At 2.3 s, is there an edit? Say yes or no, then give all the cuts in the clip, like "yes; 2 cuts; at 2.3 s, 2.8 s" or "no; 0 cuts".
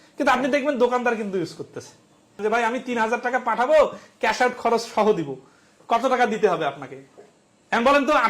yes; 1 cut; at 2.3 s